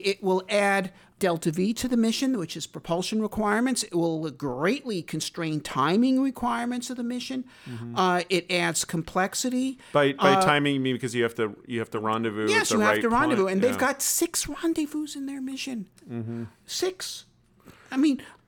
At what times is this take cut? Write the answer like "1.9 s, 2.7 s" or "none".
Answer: 1.1 s